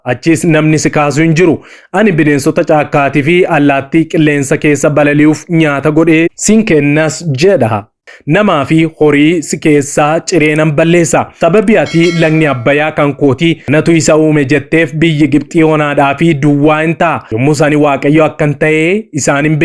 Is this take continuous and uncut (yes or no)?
no